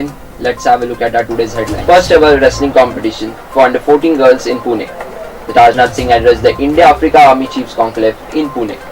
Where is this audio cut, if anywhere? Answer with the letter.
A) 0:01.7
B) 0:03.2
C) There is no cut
A